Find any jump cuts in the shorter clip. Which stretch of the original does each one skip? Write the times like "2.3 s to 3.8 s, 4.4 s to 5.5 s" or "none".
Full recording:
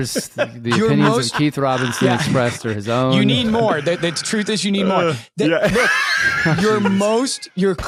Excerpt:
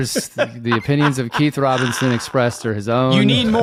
none